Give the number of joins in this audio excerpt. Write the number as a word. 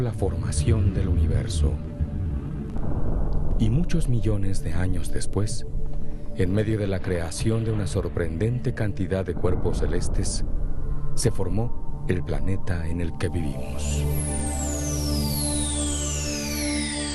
one